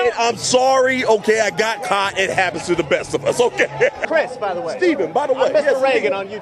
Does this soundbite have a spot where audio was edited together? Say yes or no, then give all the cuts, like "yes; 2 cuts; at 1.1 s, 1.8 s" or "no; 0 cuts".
yes; 1 cut; at 4.1 s